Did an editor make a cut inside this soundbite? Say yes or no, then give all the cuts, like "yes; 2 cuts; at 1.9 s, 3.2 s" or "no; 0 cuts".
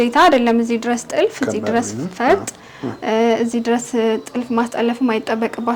no; 0 cuts